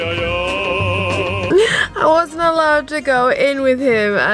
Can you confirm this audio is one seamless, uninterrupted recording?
no; 1 cut; at 1.5 s

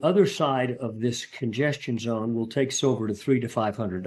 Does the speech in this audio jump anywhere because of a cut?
no; 0 cuts

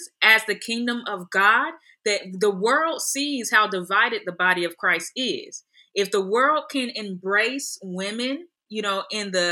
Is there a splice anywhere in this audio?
no; 0 cuts

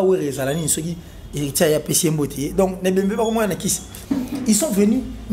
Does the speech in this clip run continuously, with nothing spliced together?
no; 1 cut; at 3.9 s

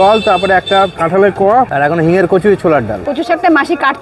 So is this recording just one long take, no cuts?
no; 1 cut; at 3.0 s

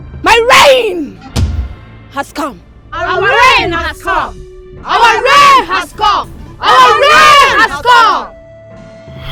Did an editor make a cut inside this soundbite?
no; 0 cuts

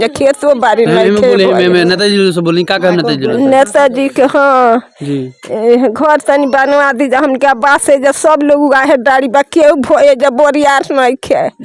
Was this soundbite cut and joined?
no; 0 cuts

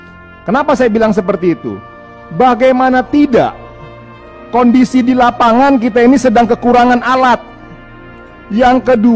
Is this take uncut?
yes; 0 cuts

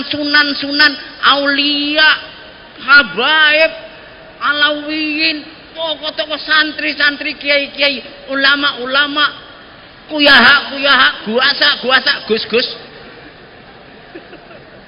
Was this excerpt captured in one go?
yes; 0 cuts

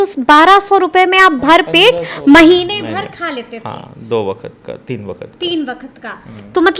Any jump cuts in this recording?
no; 0 cuts

